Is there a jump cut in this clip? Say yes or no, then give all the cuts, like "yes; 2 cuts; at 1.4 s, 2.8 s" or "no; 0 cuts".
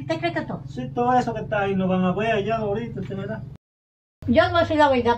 yes; 1 cut; at 3.9 s